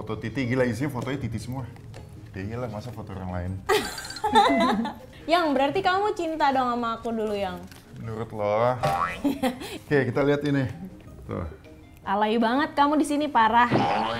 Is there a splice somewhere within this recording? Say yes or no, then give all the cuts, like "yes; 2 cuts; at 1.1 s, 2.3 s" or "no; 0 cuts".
no; 0 cuts